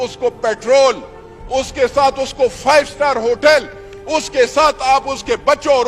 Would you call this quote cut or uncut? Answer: uncut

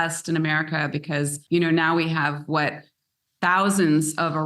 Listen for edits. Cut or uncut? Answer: cut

